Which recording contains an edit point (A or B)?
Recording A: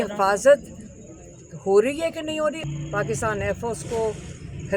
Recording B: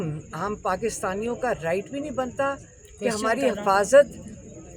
A